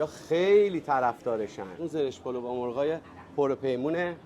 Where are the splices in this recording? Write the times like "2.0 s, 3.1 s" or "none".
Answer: 1.8 s